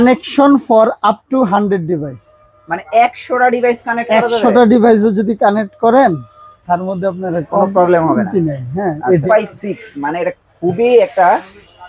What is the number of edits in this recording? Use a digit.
1